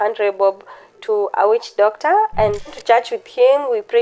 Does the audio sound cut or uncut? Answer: cut